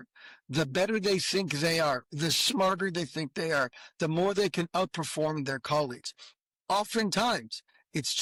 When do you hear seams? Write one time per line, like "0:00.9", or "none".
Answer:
none